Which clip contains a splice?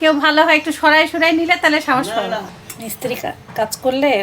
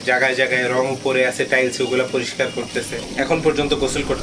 first; 1 cut; at 2.5 s

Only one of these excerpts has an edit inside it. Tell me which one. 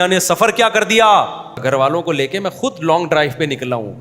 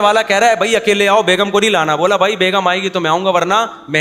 first; 1 cut; at 1.6 s

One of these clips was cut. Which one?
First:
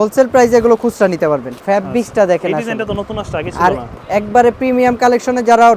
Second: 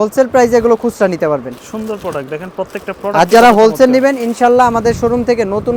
first; 2 cuts; at 1.6 s, 3.9 s

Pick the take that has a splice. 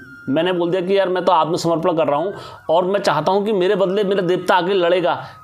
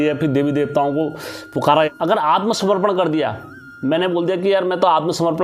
second; 1 cut; at 1.9 s

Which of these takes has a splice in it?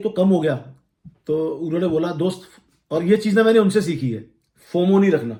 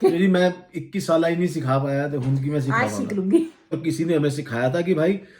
second; 1 cut; at 3.7 s

